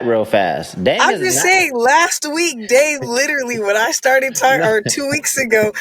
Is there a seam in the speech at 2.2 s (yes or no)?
no